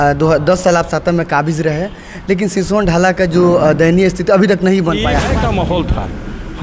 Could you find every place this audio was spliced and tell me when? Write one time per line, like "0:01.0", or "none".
0:05.3